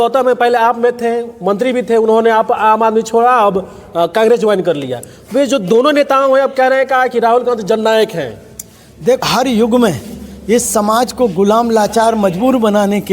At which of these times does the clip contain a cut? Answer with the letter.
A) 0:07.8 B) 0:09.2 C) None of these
B